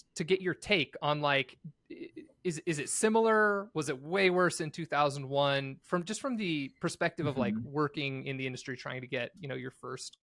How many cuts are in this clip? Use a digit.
0